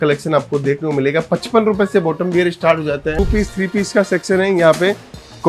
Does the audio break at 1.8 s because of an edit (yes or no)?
no